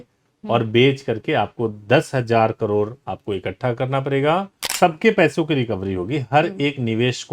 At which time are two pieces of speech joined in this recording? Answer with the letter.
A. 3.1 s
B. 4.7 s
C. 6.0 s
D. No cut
B